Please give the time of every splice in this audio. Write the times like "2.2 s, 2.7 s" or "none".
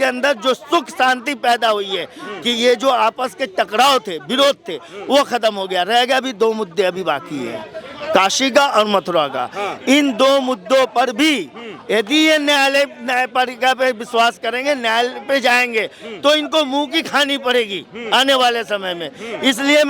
none